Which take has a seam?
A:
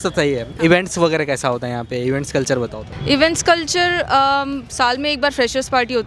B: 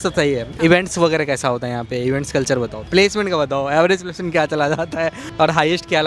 B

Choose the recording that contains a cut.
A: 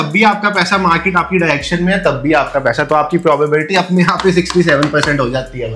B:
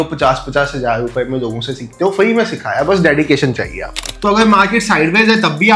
B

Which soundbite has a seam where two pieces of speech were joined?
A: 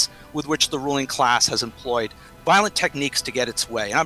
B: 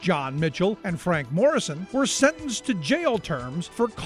A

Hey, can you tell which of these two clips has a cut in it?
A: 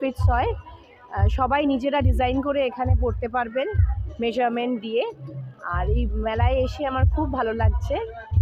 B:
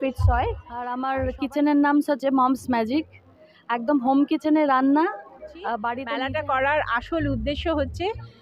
B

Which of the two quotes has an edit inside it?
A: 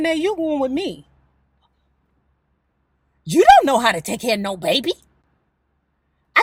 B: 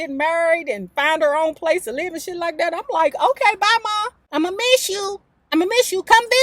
B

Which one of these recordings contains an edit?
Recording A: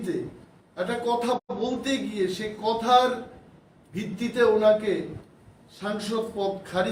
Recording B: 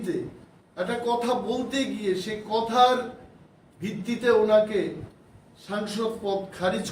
B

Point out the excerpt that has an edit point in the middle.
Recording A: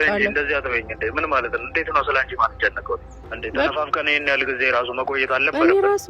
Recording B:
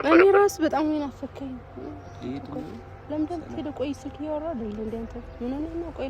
A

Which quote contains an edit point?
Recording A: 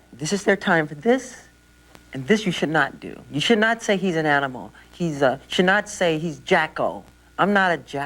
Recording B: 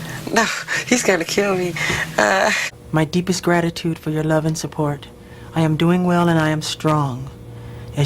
B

